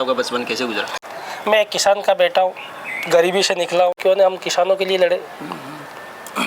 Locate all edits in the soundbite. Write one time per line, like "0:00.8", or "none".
0:01.0
0:04.0